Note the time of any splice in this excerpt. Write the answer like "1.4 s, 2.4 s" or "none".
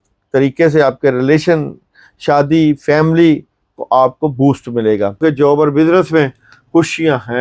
5.2 s